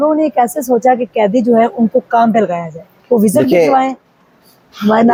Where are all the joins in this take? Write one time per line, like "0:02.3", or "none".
none